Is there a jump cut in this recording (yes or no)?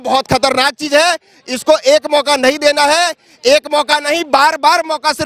no